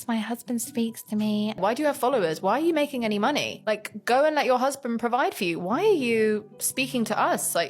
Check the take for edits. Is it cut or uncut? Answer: cut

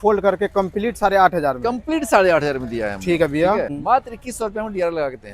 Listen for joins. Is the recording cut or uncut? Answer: cut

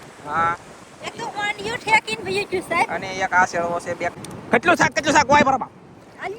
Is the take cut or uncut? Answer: cut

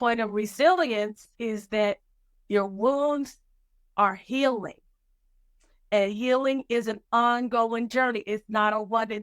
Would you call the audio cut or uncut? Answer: cut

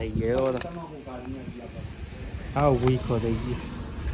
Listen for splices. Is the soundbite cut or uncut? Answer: uncut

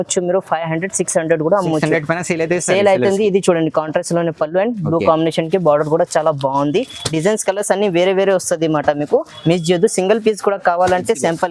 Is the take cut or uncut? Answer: uncut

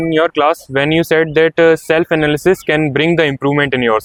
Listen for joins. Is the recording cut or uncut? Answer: uncut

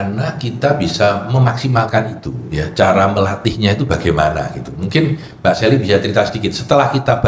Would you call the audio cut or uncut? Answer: uncut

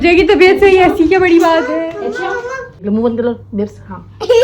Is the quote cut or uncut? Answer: cut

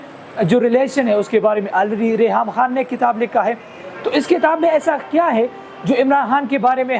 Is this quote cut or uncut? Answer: uncut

